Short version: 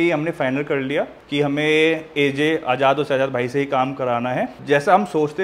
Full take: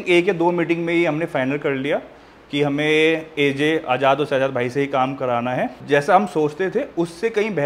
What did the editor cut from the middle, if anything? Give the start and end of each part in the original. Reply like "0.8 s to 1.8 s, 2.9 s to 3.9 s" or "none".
2.1 s to 2.4 s